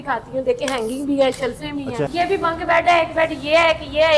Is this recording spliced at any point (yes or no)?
yes